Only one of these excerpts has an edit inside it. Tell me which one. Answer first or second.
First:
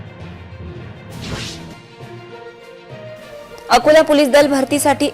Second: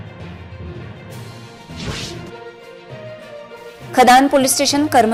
first